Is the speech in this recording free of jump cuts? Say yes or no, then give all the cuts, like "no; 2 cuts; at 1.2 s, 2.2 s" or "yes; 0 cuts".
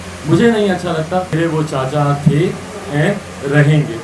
no; 1 cut; at 1.3 s